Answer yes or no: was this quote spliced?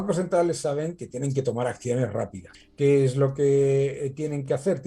no